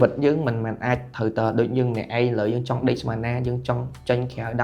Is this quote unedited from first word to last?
yes; 0 cuts

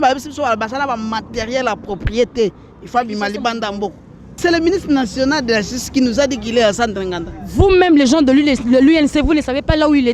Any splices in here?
yes; 1 cut; at 4.4 s

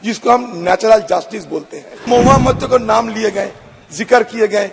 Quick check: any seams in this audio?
yes; 1 cut; at 2.0 s

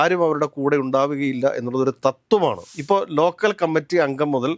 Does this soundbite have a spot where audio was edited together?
yes; 1 cut; at 2.6 s

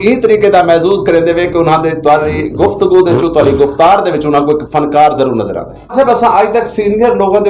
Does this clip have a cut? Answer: yes; 1 cut; at 5.9 s

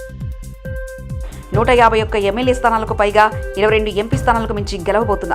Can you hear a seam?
no; 0 cuts

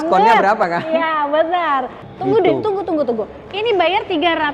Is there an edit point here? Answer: yes; 1 cut; at 2.0 s

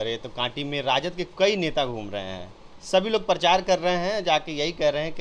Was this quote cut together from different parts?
no; 0 cuts

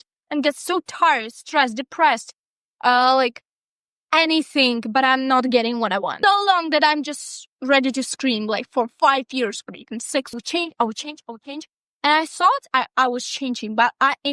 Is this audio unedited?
no; 2 cuts; at 6.1 s, 10.4 s

